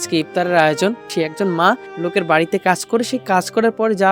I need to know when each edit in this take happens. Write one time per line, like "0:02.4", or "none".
0:01.0
0:01.9

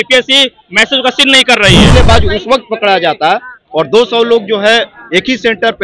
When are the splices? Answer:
0:01.9

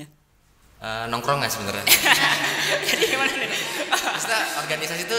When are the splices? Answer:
none

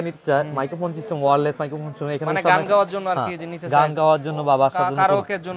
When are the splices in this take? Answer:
none

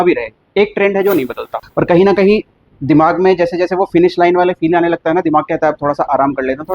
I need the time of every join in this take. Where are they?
0:01.6

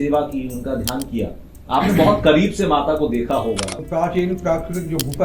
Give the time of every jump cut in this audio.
0:03.7

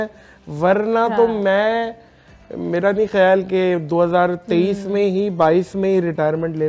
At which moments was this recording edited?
none

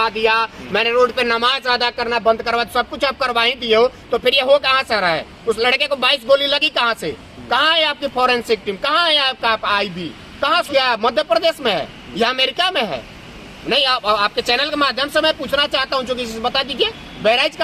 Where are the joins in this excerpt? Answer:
0:10.7

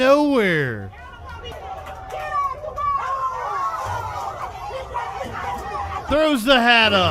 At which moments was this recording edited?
0:01.5
0:06.1

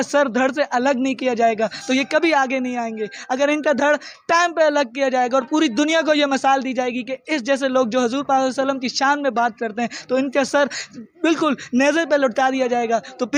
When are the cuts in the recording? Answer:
none

